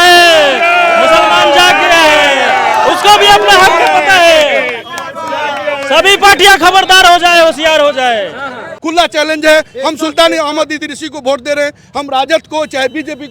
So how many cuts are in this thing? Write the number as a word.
one